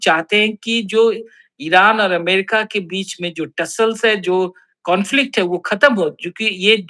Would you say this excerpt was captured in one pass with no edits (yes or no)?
yes